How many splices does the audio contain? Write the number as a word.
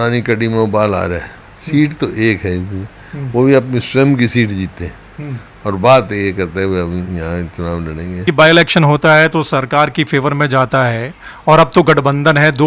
one